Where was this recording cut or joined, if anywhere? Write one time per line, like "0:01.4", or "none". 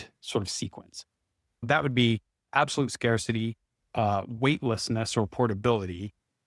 0:01.7